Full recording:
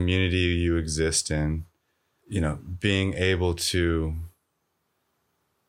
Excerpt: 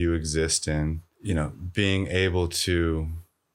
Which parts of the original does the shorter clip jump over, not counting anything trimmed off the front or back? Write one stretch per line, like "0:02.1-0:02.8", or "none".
0:01.7-0:02.2